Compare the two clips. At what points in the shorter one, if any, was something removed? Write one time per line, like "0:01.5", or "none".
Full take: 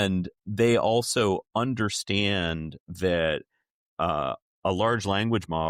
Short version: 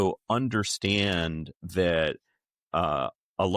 none